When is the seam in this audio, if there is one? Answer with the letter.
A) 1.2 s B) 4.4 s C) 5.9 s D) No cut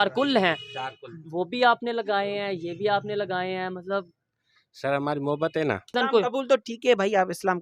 C